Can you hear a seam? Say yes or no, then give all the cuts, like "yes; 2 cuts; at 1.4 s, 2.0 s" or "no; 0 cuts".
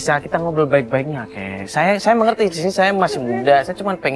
no; 0 cuts